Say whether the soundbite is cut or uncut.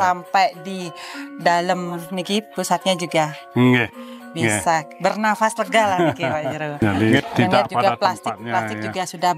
cut